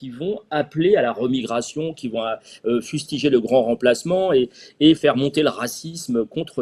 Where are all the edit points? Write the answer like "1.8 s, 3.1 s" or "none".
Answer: none